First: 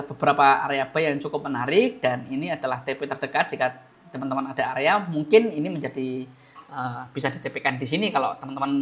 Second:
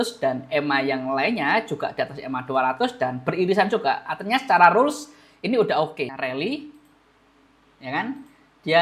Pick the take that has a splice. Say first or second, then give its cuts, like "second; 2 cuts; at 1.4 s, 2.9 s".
second; 1 cut; at 6.1 s